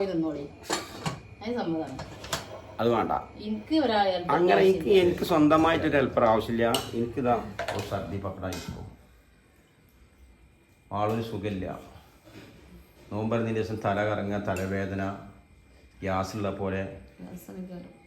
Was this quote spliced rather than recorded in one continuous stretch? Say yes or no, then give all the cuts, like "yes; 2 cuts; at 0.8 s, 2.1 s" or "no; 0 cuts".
yes; 1 cut; at 7.8 s